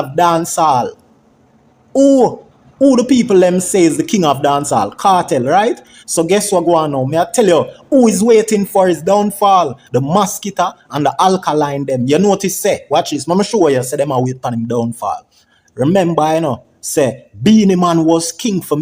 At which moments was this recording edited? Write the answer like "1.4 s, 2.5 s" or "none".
none